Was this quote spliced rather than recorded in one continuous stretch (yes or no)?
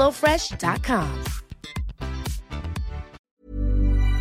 yes